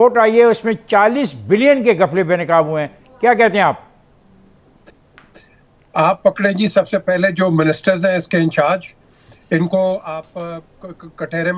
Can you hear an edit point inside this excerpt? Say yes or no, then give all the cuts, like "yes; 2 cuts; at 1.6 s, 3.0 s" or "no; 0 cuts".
no; 0 cuts